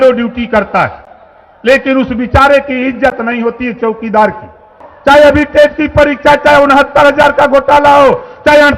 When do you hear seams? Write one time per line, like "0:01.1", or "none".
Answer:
0:04.9